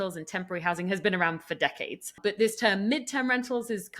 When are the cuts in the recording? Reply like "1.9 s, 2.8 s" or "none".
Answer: 2.2 s